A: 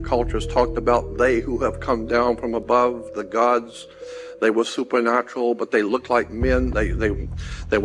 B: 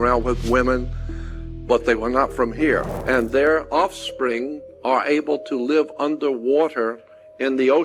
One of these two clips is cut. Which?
B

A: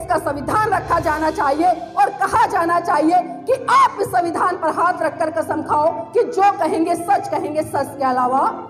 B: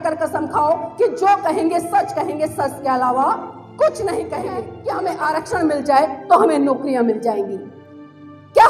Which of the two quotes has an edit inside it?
B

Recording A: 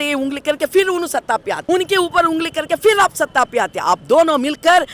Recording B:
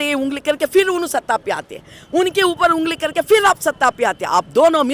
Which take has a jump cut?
A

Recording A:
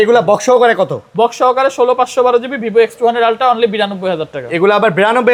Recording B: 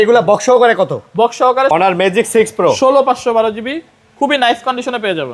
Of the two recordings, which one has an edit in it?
B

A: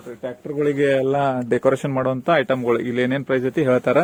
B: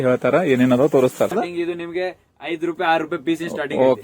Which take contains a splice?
B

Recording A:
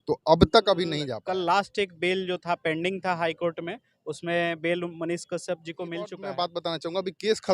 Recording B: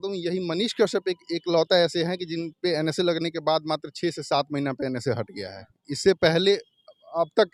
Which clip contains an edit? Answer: A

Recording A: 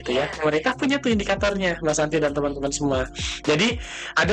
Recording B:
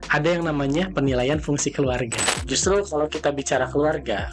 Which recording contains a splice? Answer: B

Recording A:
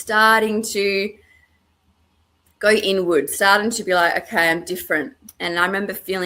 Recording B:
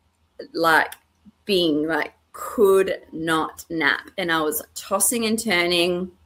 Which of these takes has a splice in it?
A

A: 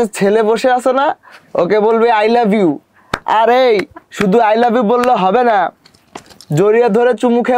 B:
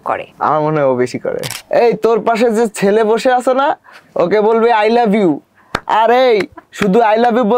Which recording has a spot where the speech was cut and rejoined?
B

